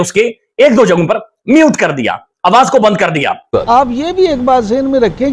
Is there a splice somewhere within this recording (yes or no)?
yes